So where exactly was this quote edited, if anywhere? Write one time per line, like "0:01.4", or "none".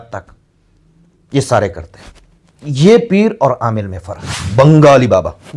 0:04.4